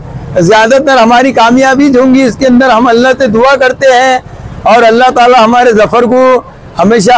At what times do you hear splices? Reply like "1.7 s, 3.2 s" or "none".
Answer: none